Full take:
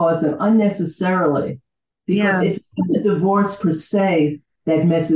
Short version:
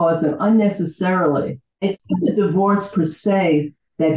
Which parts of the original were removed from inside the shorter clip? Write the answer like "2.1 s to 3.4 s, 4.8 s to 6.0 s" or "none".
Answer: 2.0 s to 2.6 s